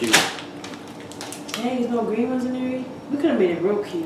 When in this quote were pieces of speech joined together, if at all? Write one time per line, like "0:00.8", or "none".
0:03.0